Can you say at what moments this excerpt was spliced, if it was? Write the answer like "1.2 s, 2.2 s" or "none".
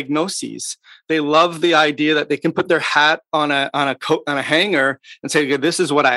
none